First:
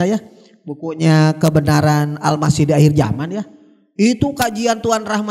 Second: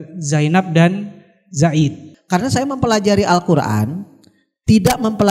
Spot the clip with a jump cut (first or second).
second